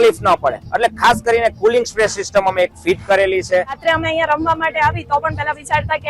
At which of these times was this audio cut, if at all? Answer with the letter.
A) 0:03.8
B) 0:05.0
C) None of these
A